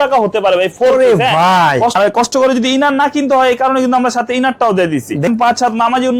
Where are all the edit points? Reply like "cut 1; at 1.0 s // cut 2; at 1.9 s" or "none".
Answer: cut 1; at 2.0 s // cut 2; at 5.3 s